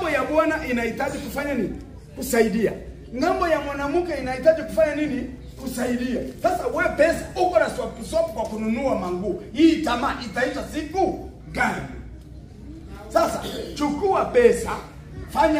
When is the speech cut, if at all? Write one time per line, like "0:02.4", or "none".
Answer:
none